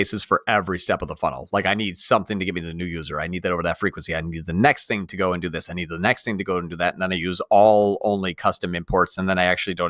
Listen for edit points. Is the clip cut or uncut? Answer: uncut